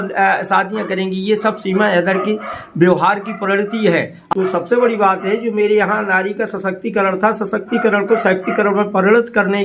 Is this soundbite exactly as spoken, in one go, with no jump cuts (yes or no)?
yes